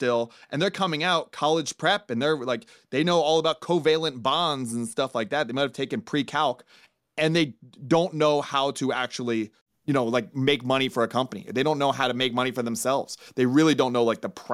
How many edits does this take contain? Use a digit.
1